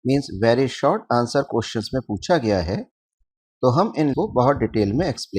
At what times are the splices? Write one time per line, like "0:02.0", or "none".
0:04.1